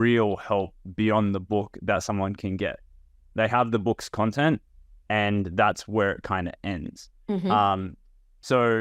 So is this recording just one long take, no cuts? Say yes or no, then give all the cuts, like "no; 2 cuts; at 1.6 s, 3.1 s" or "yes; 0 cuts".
yes; 0 cuts